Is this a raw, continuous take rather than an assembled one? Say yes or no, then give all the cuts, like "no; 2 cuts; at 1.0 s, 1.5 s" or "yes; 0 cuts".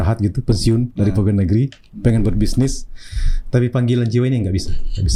yes; 0 cuts